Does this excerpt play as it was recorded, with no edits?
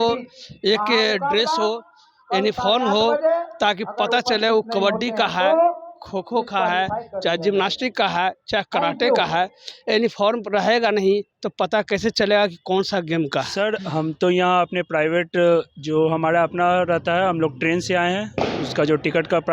no; 1 cut; at 13.5 s

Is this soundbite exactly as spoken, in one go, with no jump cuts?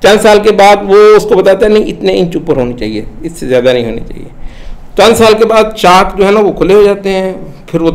yes; 0 cuts

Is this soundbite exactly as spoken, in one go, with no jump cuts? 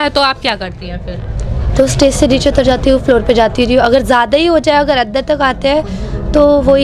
yes; 0 cuts

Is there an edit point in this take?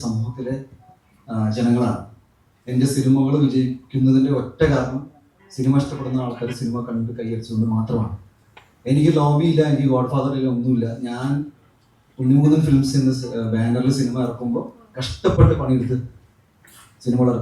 no; 0 cuts

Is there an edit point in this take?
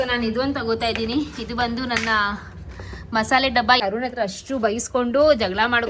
yes; 1 cut; at 3.8 s

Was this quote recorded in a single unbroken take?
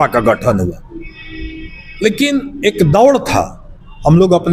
yes; 0 cuts

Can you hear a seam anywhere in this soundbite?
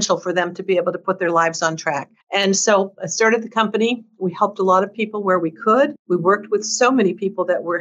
yes; 2 cuts; at 2.1 s, 6.0 s

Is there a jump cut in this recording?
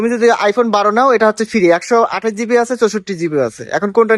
no; 0 cuts

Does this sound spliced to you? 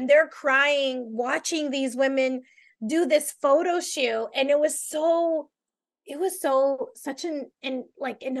no; 0 cuts

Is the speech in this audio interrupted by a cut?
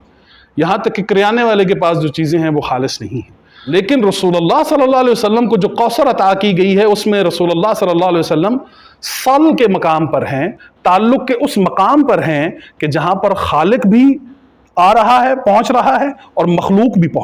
yes; 1 cut; at 3.7 s

